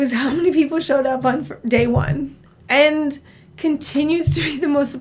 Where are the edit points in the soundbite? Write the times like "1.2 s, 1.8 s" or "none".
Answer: none